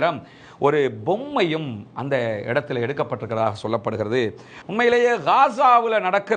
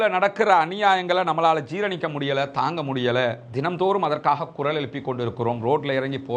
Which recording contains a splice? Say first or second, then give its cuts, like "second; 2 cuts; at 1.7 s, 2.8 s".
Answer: first; 1 cut; at 4.6 s